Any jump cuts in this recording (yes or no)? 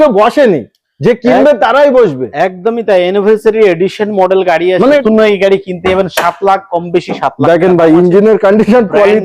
yes